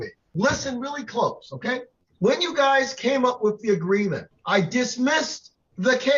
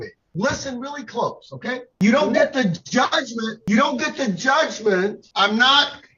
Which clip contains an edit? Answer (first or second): second